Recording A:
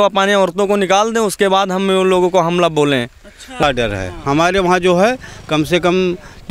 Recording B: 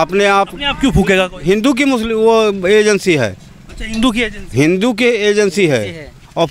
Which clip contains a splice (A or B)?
A